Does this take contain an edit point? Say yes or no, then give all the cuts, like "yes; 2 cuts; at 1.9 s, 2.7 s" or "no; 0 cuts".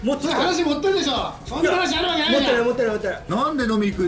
yes; 1 cut; at 3.2 s